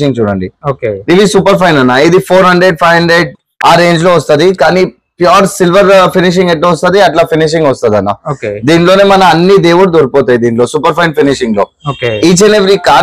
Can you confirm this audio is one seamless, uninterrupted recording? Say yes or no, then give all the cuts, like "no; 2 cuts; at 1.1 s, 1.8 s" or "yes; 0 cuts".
yes; 0 cuts